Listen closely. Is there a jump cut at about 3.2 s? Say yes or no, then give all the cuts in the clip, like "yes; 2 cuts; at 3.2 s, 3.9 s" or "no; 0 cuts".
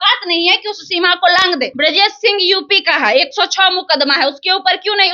no; 1 cut; at 1.7 s